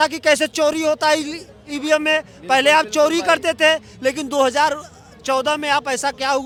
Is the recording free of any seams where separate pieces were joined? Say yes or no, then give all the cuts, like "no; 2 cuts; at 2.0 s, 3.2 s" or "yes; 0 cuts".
yes; 0 cuts